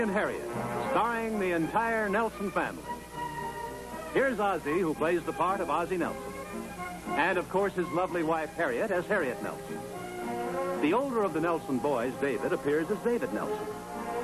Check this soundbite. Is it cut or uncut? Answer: cut